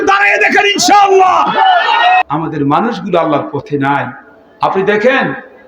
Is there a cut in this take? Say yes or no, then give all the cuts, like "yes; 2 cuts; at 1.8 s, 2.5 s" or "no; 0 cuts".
yes; 1 cut; at 2.2 s